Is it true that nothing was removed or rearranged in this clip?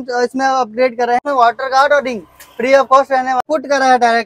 no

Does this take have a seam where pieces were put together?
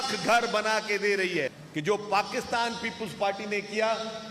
yes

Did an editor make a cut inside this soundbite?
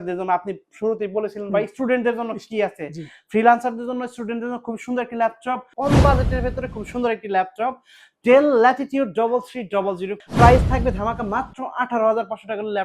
yes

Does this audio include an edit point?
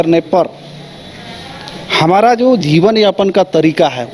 no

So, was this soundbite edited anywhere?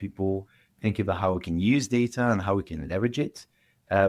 no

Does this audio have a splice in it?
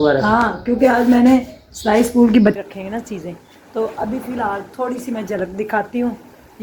yes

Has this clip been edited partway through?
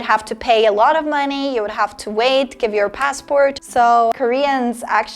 yes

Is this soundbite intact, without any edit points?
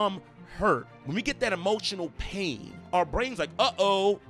no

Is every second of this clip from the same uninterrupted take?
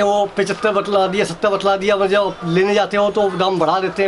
yes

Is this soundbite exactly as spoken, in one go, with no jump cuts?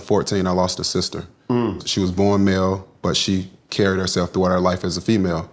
no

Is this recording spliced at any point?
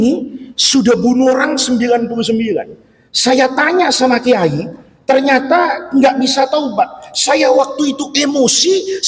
no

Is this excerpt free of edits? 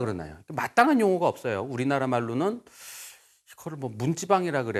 yes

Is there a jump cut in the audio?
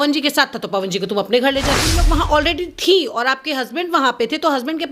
yes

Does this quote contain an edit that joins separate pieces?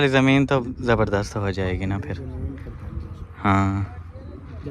no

